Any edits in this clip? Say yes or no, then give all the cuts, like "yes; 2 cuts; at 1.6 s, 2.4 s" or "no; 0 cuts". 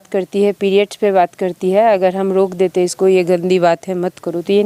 no; 0 cuts